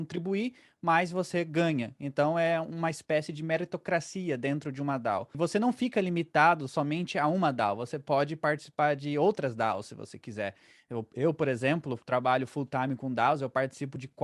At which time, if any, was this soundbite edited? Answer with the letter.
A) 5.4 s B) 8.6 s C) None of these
A